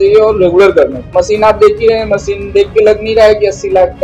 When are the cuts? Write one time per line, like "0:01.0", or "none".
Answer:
0:01.0

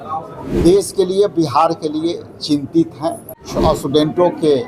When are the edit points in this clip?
0:03.4

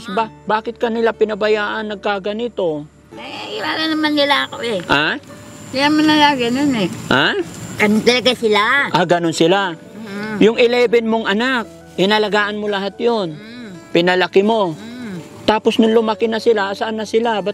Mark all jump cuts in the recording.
none

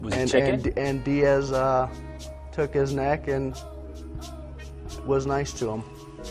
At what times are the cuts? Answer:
0:03.5

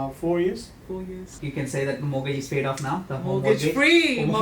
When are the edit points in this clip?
0:01.3

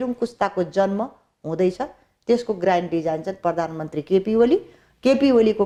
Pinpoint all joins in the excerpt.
none

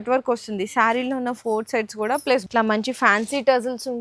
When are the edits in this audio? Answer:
0:02.5

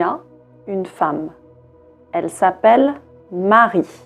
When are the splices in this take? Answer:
0:02.0

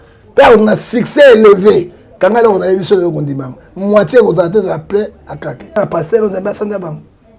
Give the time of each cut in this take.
0:05.8

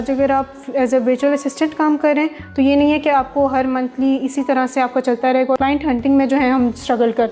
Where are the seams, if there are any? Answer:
0:05.6

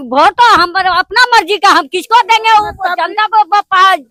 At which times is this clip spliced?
none

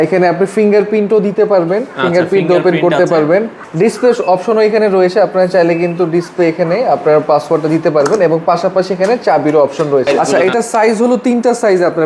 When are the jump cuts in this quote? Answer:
0:03.6
0:10.2

